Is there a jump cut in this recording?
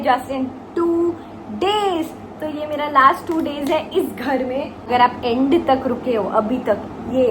yes; 1 cut; at 4.9 s

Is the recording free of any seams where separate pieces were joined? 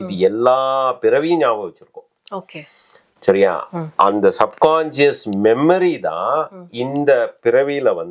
yes; 0 cuts

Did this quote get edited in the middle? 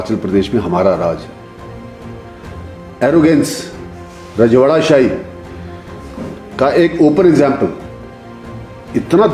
no; 0 cuts

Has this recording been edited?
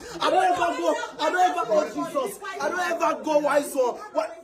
no; 0 cuts

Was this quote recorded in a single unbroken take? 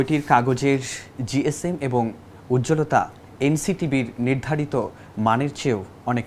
yes; 0 cuts

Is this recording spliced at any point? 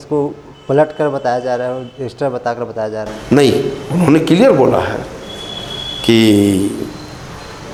no; 0 cuts

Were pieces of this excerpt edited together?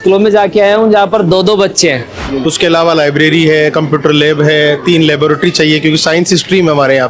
yes; 1 cut; at 2.2 s

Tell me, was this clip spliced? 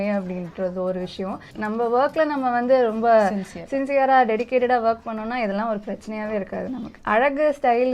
yes; 2 cuts; at 1.5 s, 7.0 s

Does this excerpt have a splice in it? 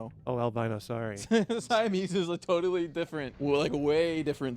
yes; 1 cut; at 3.2 s

